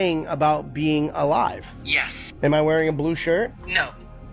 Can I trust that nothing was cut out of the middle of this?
yes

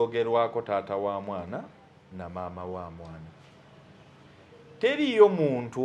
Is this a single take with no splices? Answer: yes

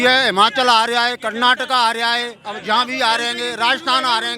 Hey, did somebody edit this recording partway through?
no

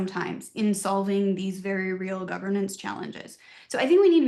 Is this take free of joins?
yes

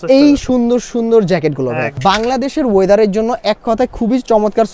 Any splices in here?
yes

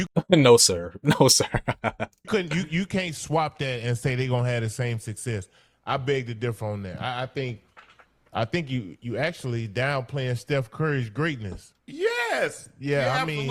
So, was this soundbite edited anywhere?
no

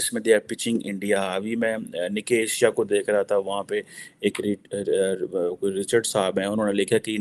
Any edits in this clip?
no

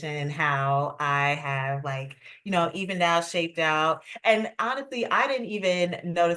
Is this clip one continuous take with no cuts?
yes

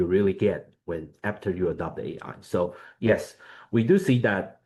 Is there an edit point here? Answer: no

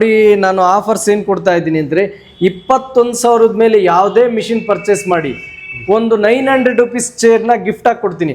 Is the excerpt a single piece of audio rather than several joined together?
yes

